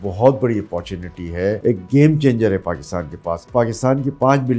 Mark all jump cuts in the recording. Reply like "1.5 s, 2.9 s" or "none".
1.6 s, 3.5 s